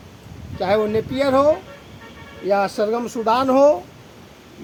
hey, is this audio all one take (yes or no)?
yes